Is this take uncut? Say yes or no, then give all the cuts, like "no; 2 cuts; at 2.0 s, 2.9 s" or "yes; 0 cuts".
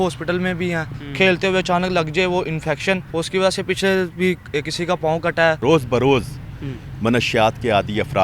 no; 3 cuts; at 1.0 s, 3.1 s, 5.6 s